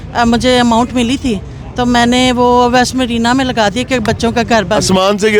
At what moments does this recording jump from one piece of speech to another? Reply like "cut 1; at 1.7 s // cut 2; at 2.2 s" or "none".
none